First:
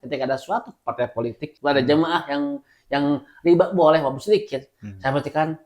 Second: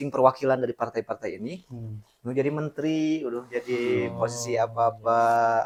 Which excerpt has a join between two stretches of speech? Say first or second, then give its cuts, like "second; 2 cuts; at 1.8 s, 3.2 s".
first; 1 cut; at 1.5 s